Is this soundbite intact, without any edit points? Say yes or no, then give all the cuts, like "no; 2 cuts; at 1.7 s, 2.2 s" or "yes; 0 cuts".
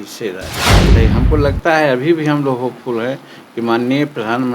no; 1 cut; at 0.9 s